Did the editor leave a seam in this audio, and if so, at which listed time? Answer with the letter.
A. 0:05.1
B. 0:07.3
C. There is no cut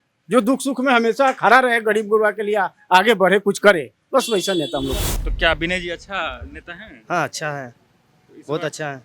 A